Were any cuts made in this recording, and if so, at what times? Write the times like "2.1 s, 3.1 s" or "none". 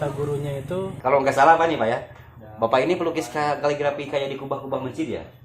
1.0 s